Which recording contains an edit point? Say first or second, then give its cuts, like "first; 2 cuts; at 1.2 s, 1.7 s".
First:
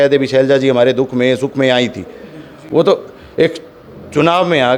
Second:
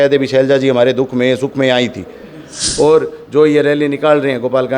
second; 1 cut; at 2.5 s